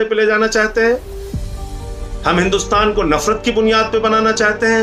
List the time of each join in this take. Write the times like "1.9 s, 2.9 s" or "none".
none